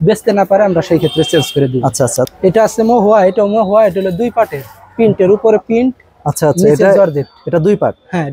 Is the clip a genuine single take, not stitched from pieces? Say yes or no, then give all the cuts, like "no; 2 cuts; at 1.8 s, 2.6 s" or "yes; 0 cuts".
no; 1 cut; at 2.3 s